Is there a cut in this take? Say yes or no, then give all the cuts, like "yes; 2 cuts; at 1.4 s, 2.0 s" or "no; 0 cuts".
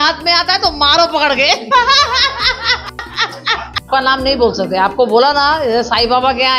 yes; 1 cut; at 3.9 s